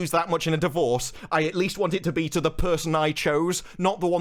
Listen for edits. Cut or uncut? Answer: uncut